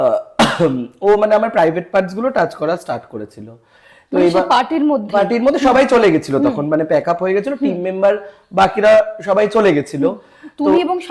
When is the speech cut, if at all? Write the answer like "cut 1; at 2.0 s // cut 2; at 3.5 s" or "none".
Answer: none